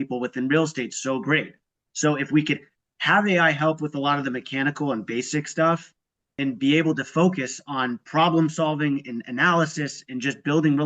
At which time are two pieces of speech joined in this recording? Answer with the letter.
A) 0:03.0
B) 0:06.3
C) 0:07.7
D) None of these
B